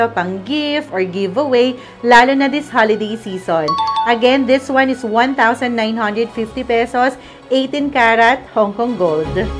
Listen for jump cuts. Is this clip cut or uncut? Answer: uncut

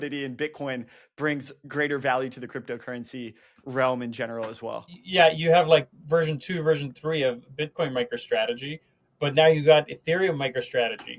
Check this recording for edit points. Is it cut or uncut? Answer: uncut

